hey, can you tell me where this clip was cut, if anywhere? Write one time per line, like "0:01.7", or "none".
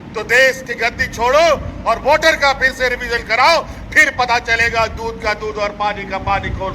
none